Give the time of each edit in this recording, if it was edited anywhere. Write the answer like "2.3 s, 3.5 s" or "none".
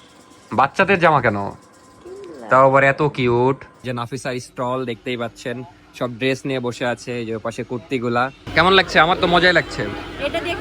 3.8 s, 8.4 s